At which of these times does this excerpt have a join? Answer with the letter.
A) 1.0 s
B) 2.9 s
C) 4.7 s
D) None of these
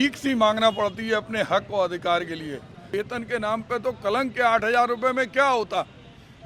B